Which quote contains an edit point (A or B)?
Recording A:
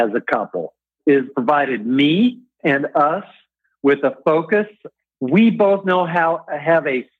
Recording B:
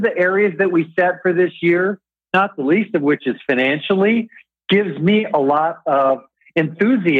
A